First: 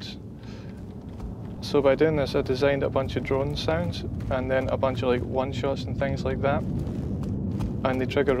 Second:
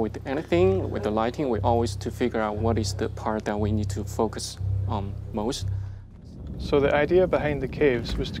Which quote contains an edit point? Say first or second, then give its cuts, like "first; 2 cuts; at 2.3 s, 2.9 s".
second; 1 cut; at 6.2 s